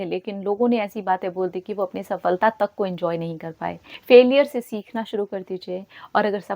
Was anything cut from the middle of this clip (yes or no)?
yes